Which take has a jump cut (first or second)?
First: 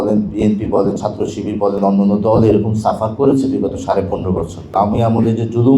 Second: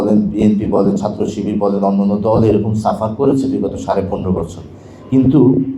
first